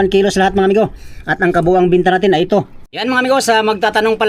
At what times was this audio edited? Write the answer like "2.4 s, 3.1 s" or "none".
2.8 s